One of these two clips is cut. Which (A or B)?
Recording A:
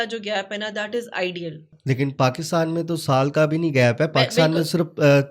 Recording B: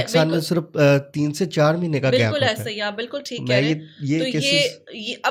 A